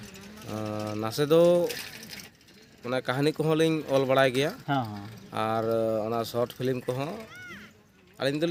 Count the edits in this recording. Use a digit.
0